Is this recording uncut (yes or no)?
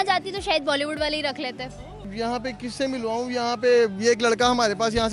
no